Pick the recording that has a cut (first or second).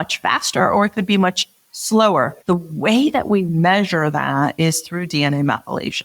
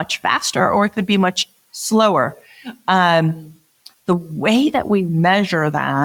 first